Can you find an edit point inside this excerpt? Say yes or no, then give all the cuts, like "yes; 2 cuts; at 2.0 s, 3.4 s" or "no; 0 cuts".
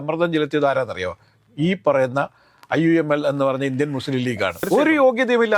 yes; 1 cut; at 4.7 s